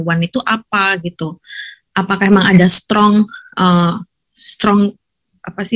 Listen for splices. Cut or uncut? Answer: uncut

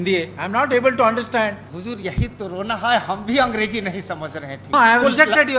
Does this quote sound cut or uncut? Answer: cut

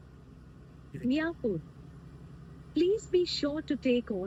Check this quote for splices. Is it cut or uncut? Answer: uncut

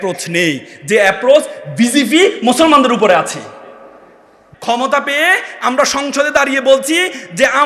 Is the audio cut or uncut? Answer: cut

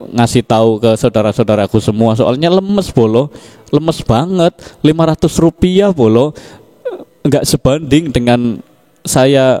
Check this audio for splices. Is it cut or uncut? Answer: uncut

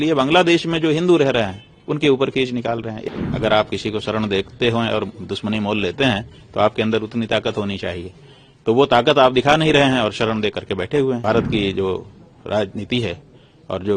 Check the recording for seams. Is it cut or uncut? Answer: cut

